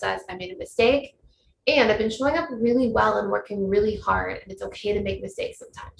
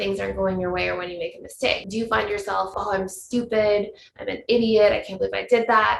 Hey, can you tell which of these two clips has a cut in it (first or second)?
second